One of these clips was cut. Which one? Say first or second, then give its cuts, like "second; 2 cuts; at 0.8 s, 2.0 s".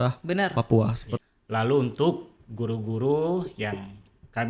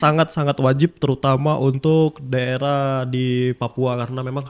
first; 1 cut; at 1.1 s